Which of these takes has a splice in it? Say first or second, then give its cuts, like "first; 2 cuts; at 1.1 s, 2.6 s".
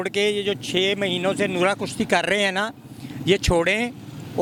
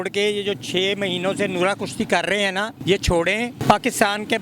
second; 2 cuts; at 2.7 s, 3.6 s